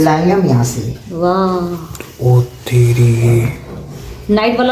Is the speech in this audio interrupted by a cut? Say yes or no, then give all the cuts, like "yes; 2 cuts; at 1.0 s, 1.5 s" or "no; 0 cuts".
no; 0 cuts